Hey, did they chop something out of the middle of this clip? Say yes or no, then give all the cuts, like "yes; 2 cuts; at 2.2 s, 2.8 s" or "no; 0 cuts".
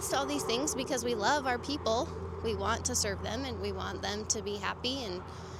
no; 0 cuts